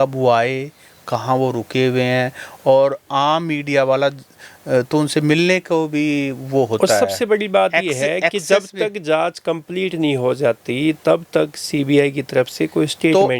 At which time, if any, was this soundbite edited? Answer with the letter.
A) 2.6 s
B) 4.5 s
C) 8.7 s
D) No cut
D